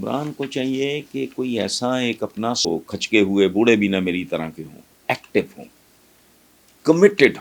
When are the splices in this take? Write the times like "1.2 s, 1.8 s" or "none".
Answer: 2.7 s